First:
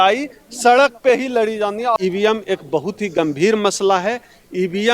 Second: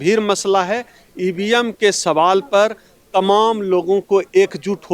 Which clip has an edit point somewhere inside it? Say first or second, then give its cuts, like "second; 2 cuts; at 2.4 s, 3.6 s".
first; 1 cut; at 2.0 s